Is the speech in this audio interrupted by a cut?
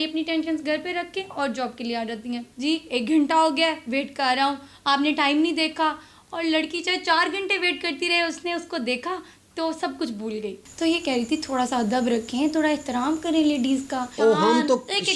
yes; 3 cuts; at 2.5 s, 10.6 s, 14.1 s

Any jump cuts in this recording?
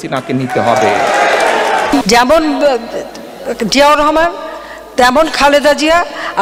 no; 0 cuts

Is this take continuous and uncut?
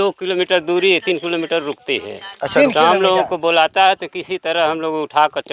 yes; 0 cuts

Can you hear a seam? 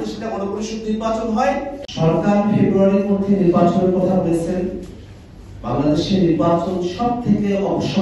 yes; 1 cut; at 1.8 s

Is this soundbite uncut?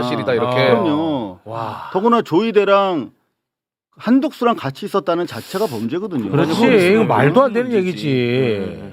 yes; 0 cuts

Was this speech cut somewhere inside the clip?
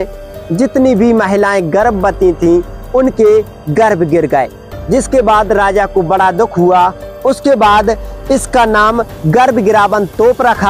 no; 0 cuts

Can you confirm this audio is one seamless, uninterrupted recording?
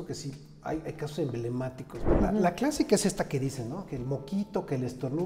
no; 1 cut; at 2.0 s

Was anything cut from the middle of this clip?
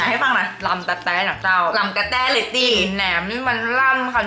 no; 0 cuts

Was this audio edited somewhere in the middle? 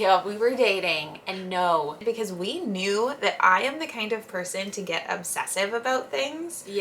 yes; 1 cut; at 2.0 s

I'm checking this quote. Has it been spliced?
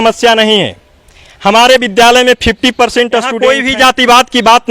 yes; 1 cut; at 3.3 s

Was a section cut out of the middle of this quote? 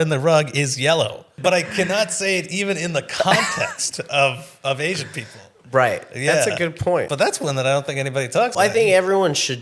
yes; 3 cuts; at 1.3 s, 7.1 s, 8.5 s

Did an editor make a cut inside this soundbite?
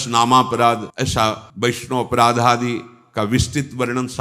yes; 1 cut; at 1.0 s

